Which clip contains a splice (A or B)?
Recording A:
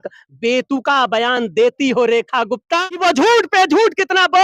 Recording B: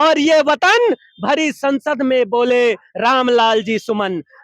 A